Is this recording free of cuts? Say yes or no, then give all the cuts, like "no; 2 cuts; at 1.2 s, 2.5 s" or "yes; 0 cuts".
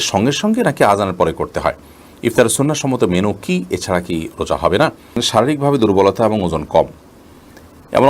no; 1 cut; at 5.2 s